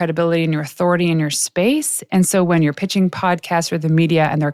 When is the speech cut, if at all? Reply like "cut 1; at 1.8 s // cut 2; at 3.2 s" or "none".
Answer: none